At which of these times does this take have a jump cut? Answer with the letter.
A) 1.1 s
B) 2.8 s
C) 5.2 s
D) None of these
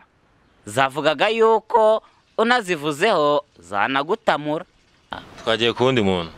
C